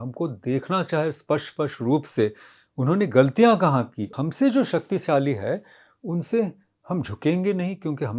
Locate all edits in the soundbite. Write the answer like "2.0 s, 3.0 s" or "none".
4.1 s